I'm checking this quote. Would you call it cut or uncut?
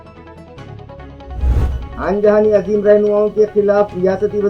cut